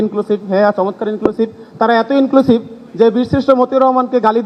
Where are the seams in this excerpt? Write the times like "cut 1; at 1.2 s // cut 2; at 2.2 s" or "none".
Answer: none